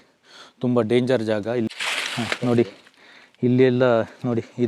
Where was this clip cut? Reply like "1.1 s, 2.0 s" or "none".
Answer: 1.7 s